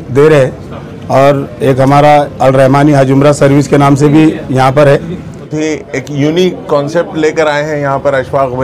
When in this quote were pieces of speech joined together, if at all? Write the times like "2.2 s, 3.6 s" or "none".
5.5 s